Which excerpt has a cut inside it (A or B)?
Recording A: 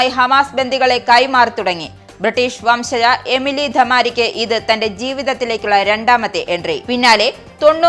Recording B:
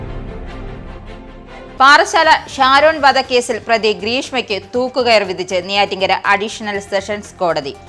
B